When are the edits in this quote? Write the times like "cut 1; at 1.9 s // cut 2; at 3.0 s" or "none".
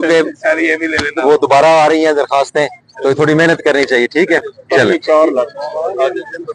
none